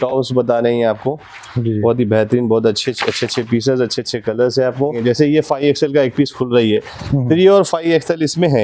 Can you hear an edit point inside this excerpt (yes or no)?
yes